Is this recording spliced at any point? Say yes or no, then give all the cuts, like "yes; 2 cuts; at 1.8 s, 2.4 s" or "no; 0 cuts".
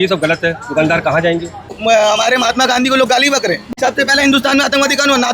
yes; 2 cuts; at 1.8 s, 3.7 s